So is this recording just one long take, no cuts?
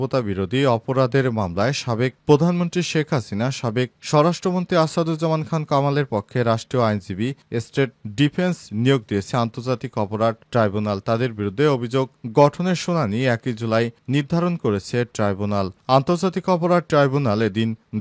yes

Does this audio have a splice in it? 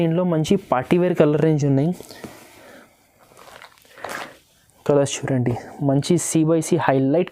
no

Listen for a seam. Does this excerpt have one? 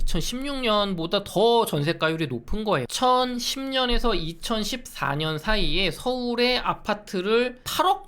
yes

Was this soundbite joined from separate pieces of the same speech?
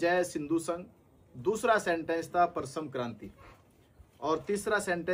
no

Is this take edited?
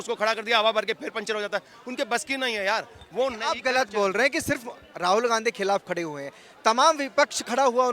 no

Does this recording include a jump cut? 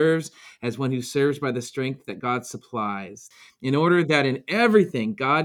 yes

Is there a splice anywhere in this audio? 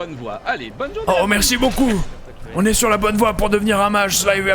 yes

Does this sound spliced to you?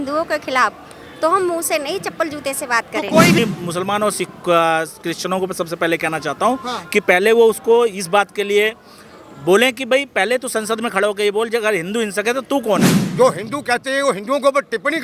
yes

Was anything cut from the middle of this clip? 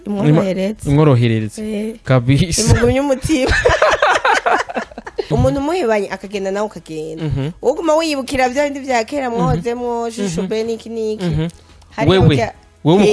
yes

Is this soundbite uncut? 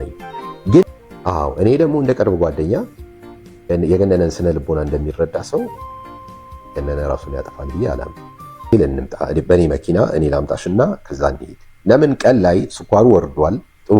no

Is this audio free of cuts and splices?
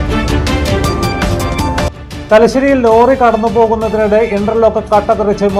no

